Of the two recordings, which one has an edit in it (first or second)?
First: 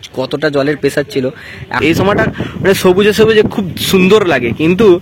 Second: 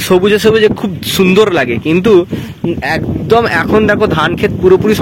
first